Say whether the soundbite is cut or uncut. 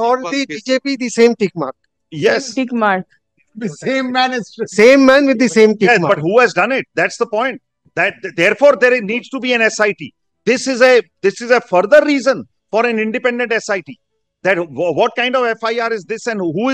uncut